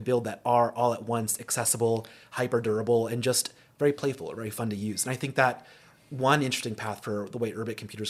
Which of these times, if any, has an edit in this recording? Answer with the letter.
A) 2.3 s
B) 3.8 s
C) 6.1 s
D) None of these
D